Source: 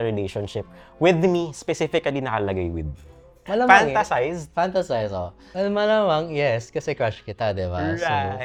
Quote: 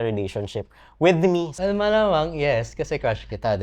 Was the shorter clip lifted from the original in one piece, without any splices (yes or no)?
no